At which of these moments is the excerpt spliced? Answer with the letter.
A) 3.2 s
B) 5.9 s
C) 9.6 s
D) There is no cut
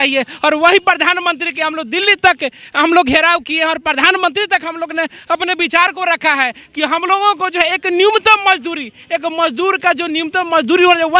D